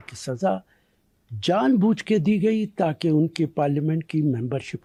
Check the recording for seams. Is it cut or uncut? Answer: uncut